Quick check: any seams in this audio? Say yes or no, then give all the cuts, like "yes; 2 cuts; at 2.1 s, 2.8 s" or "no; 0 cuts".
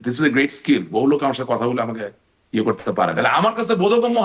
yes; 1 cut; at 3.1 s